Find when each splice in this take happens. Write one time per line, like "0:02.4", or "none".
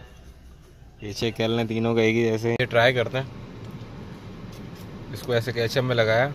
0:02.6